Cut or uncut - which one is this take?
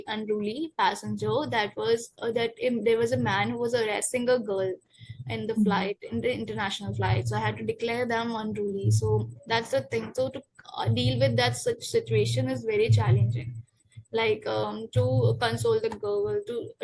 uncut